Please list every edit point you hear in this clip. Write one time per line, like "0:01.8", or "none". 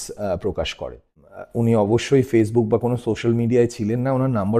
0:01.3